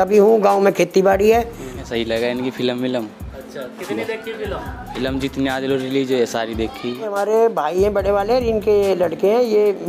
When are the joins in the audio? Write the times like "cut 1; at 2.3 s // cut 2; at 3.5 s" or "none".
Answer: cut 1; at 1.8 s // cut 2; at 7.1 s